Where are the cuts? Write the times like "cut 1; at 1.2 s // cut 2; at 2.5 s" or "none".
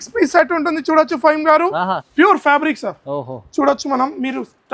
cut 1; at 2.0 s